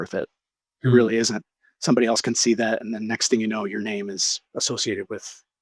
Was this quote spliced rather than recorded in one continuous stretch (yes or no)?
no